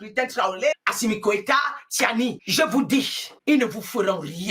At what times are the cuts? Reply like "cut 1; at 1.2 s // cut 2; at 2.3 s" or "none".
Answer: cut 1; at 0.7 s // cut 2; at 2.4 s // cut 3; at 3.2 s